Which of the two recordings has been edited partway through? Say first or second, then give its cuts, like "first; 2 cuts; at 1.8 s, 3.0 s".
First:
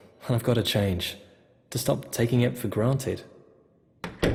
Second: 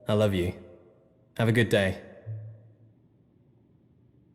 second; 1 cut; at 2.6 s